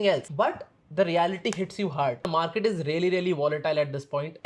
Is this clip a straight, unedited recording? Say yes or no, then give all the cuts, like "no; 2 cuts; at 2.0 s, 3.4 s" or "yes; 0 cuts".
no; 1 cut; at 2.3 s